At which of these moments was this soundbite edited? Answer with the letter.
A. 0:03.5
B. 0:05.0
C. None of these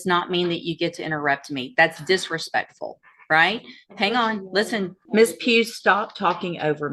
B